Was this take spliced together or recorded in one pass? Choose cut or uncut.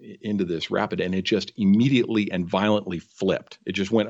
uncut